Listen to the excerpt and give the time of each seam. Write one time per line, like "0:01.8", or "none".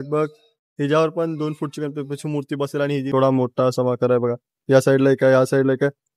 0:03.1